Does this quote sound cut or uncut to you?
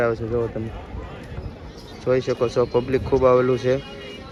uncut